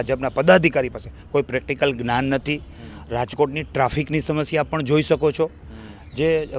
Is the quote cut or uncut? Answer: uncut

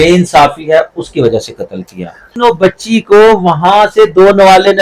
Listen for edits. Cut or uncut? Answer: cut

